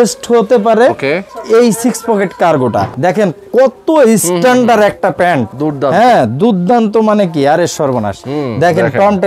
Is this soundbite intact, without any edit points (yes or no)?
no